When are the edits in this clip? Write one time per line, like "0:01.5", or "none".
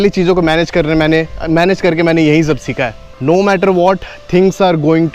0:03.0